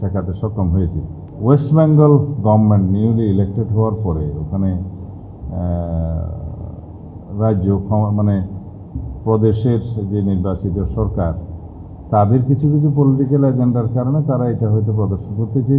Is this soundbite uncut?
no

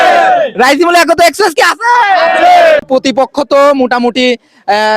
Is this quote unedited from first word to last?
no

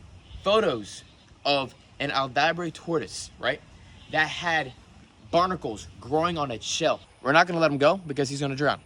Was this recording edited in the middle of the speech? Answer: yes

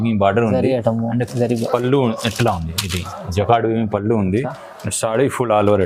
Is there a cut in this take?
no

